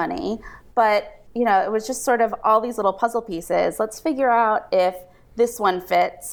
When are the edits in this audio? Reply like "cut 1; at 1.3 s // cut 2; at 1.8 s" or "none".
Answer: cut 1; at 1.2 s

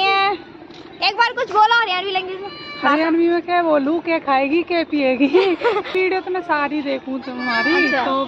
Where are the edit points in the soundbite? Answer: cut 1; at 5.9 s

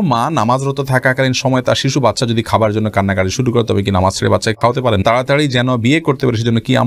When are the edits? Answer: cut 1; at 5.0 s

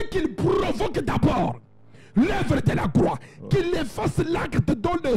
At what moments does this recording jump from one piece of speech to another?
none

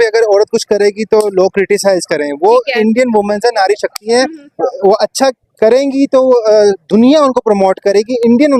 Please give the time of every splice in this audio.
none

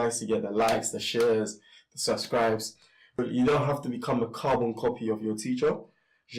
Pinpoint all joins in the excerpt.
cut 1; at 3.1 s

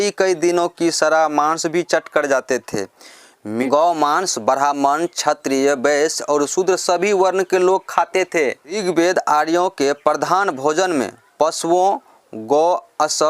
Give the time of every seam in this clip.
cut 1; at 3.4 s

